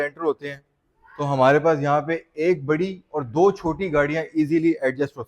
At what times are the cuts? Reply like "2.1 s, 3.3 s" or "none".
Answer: none